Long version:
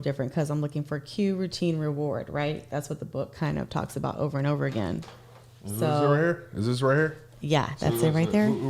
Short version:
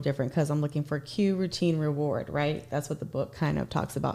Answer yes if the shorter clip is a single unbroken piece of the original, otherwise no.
yes